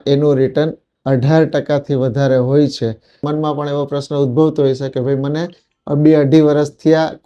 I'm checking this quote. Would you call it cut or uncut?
cut